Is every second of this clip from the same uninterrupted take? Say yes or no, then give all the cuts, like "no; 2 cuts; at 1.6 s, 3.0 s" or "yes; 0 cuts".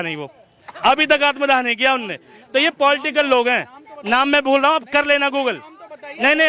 yes; 0 cuts